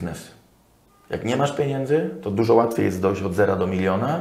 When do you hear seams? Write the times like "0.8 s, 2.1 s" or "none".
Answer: none